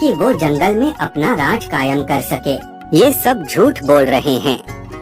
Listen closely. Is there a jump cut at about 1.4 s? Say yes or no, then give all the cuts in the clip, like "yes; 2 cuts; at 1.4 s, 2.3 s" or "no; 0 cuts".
no; 1 cut; at 2.8 s